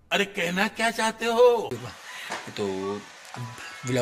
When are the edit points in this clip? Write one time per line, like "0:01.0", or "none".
0:01.7